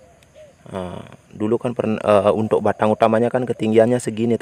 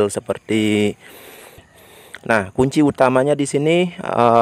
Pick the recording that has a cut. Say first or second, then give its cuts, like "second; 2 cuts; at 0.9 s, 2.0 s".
second; 1 cut; at 1.6 s